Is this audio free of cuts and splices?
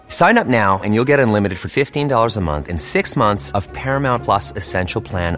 yes; 0 cuts

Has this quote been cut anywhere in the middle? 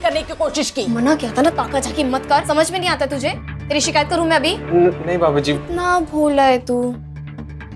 yes; 3 cuts; at 0.9 s, 2.4 s, 5.6 s

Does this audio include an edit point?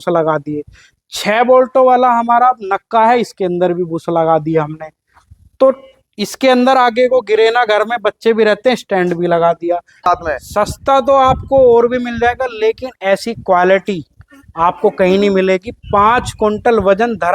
yes; 1 cut; at 10.0 s

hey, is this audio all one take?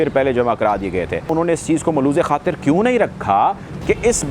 no; 1 cut; at 1.3 s

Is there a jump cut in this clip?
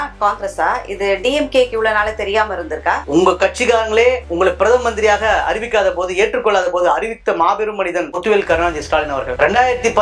yes; 1 cut; at 3.0 s

